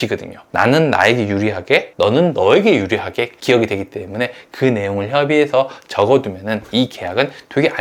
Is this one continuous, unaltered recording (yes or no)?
yes